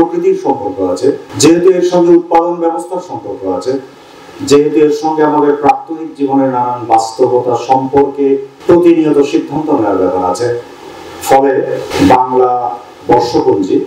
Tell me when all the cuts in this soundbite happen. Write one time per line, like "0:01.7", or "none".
0:01.3
0:08.5
0:11.9